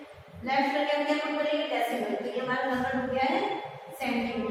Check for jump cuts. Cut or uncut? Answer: uncut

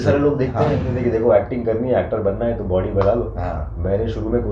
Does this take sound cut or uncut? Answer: cut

